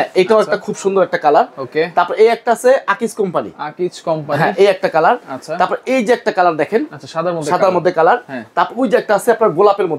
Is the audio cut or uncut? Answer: uncut